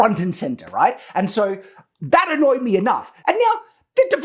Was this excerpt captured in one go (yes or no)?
no